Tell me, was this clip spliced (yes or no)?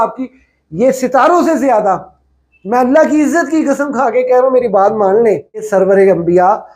yes